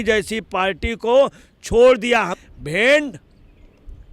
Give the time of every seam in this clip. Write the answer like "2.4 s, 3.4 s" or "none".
2.4 s